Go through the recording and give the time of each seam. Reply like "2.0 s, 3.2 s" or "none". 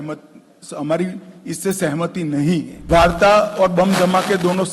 2.8 s